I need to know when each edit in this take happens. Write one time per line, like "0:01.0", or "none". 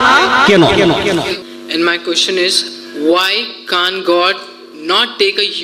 0:01.3